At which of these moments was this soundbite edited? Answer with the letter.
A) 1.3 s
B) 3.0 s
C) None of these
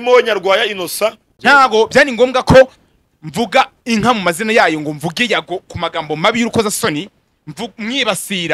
A